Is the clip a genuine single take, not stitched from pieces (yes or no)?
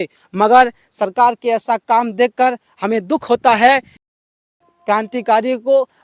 no